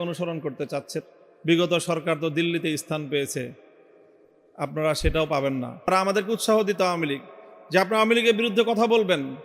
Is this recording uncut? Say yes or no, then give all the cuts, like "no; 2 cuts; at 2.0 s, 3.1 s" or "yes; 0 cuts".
no; 2 cuts; at 1.0 s, 5.9 s